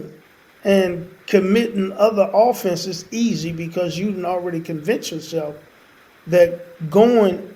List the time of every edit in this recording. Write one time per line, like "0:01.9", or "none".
none